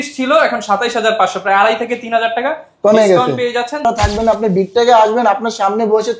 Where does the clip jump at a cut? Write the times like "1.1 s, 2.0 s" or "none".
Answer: 3.8 s

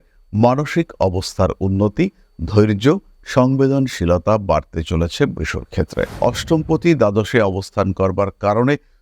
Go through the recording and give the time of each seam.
6.1 s

